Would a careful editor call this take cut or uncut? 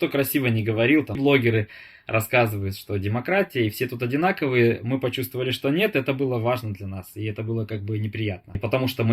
uncut